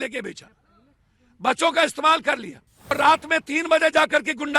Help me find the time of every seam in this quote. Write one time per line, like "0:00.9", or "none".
0:02.9